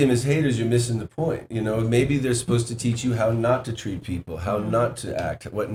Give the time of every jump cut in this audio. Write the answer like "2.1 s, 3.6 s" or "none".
none